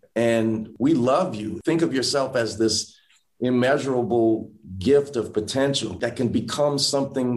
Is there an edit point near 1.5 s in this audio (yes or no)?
yes